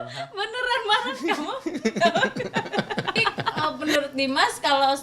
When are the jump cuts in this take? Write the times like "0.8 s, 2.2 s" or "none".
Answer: 3.6 s